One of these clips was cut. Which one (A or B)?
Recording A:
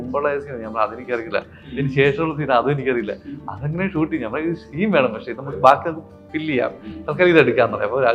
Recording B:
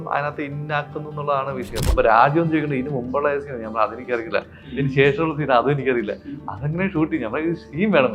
B